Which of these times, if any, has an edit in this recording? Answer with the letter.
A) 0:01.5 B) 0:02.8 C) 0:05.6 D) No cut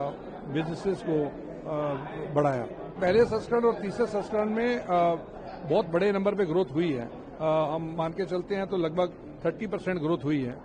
B